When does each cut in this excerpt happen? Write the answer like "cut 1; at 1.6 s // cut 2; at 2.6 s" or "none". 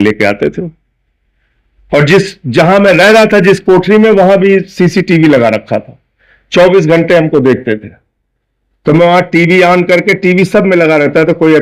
none